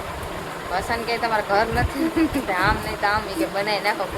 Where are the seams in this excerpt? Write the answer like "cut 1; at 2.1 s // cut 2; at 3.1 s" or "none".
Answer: none